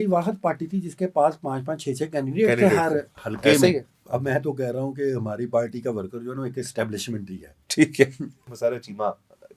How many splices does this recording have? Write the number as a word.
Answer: two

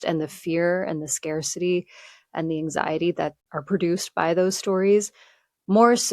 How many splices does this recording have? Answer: one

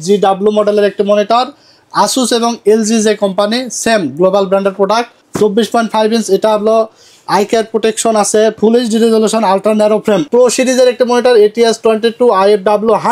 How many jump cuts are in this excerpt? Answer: two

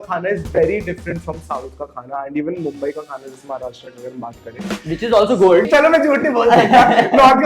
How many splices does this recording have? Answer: one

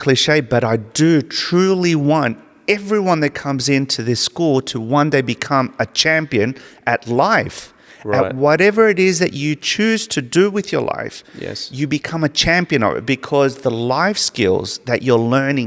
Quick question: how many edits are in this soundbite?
zero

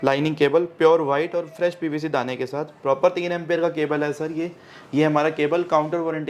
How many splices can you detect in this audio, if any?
zero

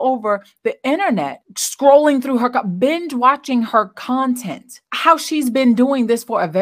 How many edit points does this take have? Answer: two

